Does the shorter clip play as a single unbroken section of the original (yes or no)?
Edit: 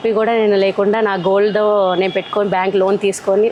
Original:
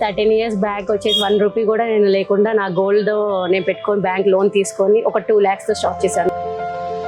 yes